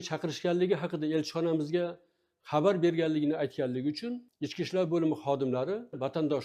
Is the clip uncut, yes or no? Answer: yes